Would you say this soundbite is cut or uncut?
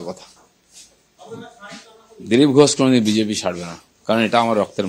uncut